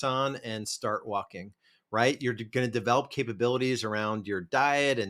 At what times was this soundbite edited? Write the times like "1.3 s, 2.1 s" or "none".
none